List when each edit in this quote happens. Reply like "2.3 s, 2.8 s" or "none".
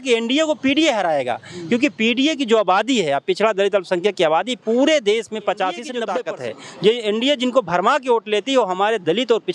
6.0 s

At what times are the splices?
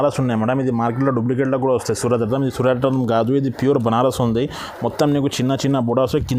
none

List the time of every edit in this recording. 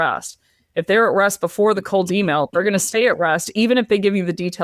1.8 s

